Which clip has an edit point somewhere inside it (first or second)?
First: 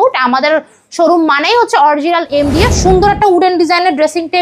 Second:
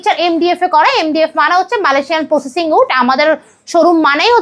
first